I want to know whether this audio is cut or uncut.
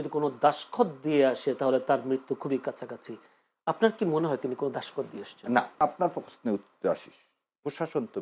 cut